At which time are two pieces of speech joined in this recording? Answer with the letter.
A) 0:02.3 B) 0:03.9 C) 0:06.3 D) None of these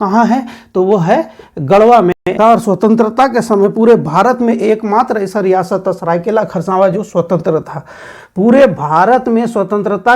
A